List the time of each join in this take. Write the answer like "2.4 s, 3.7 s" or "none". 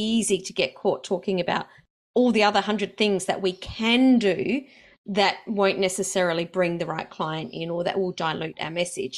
none

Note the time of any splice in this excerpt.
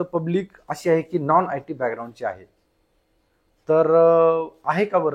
none

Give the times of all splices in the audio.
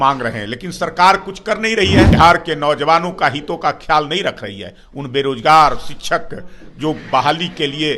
2.1 s

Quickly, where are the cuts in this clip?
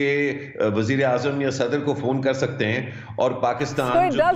none

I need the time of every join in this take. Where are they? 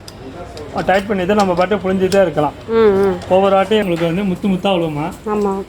3.8 s

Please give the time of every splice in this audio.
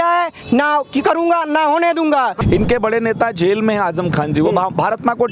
2.4 s

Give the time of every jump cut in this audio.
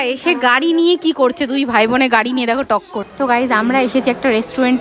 3.0 s

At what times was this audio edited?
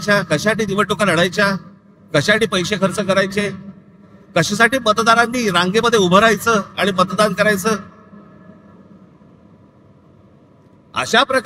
none

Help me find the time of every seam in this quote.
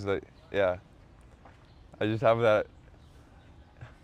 none

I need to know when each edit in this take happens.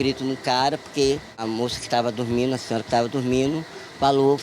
1.4 s

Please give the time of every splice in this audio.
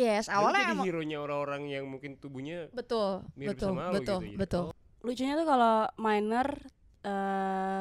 4.8 s

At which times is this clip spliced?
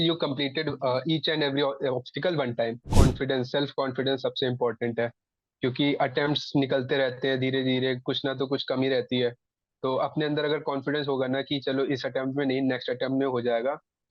2.9 s

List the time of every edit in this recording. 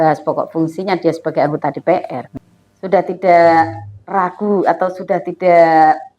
2.2 s

